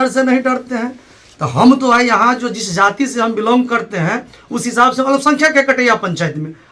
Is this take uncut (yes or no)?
yes